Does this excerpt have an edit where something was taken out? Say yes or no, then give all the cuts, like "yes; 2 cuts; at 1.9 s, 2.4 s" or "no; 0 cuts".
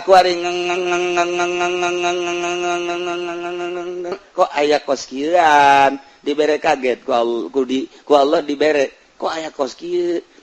yes; 1 cut; at 4.2 s